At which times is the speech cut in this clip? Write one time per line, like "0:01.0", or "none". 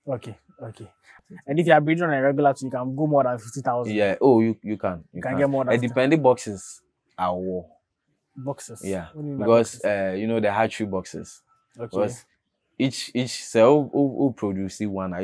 0:01.1